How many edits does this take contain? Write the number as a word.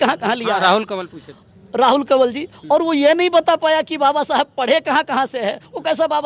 zero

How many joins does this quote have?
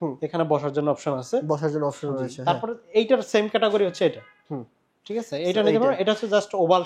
zero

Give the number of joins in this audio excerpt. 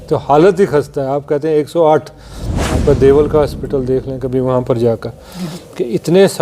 one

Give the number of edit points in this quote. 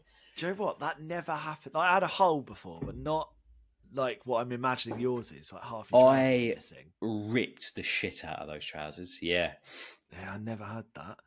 zero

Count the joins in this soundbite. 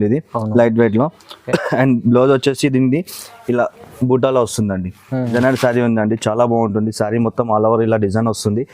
one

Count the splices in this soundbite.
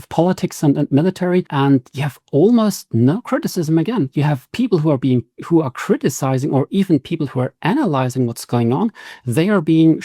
one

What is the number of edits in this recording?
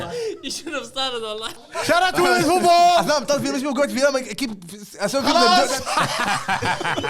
two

